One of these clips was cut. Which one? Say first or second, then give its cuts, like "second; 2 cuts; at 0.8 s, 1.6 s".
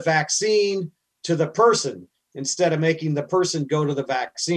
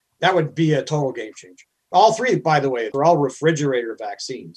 second; 2 cuts; at 1.8 s, 2.9 s